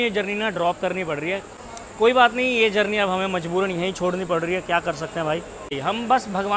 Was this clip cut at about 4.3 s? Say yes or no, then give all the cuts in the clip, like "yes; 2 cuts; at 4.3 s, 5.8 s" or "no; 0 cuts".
no; 2 cuts; at 1.5 s, 5.8 s